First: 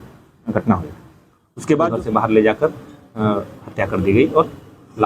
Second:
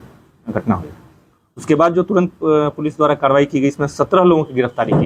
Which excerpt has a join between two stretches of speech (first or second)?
first